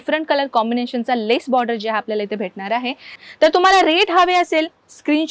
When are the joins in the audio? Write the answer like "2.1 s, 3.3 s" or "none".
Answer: 3.1 s

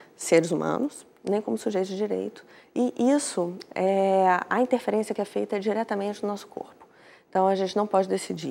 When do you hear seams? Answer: none

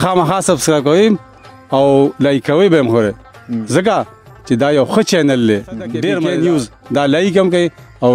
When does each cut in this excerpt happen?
6.1 s

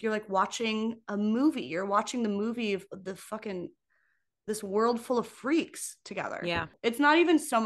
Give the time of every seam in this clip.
6.7 s

